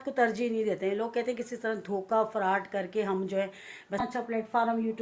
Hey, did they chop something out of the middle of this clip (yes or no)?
yes